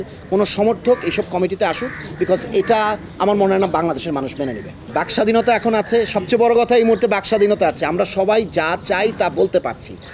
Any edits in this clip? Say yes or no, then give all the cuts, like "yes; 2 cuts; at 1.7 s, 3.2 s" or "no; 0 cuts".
no; 0 cuts